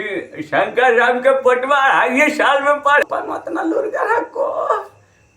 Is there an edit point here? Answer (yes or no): yes